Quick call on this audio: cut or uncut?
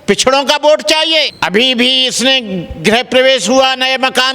cut